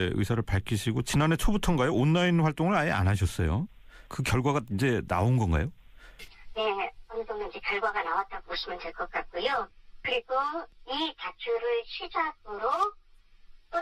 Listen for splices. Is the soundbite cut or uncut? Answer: uncut